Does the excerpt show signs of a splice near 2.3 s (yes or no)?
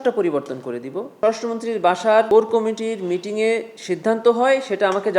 yes